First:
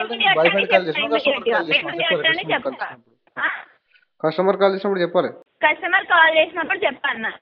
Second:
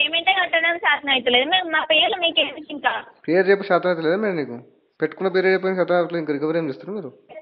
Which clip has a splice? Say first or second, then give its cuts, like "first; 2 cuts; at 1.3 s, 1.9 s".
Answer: first; 1 cut; at 5.4 s